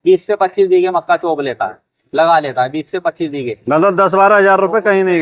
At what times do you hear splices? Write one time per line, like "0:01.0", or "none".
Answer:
none